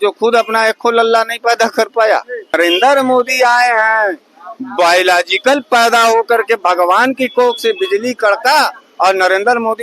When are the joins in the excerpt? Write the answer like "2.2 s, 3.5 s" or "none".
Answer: 2.5 s